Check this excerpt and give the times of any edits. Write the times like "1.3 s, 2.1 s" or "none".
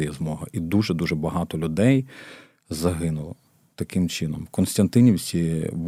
none